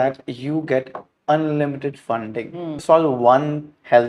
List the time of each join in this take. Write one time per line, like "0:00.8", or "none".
0:02.8